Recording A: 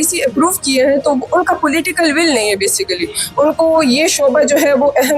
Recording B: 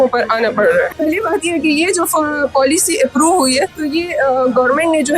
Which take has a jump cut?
B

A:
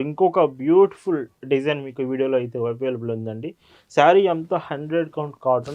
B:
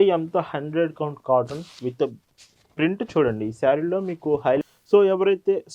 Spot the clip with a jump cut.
B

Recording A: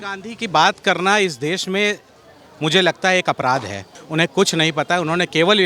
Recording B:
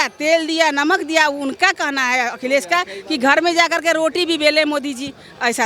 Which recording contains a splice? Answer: A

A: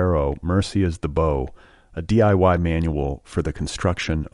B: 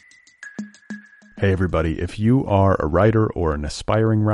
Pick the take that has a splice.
B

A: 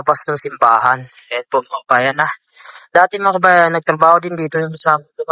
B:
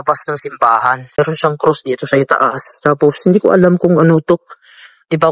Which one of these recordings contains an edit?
B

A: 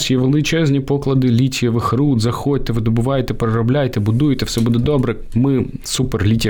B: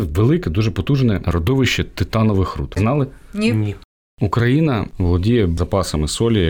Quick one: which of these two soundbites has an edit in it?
B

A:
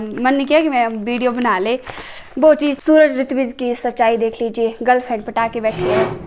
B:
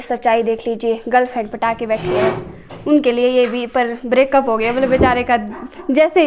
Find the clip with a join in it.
A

